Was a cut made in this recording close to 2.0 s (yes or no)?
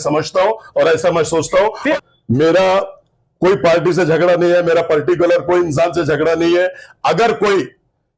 yes